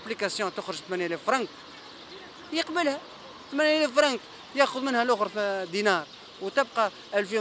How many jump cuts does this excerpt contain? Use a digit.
0